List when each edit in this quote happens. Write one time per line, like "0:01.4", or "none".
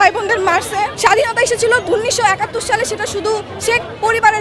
0:00.9
0:01.8